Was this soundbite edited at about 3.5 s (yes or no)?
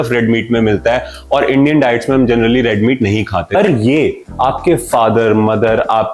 yes